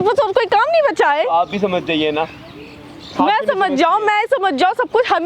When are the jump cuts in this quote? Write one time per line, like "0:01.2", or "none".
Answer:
none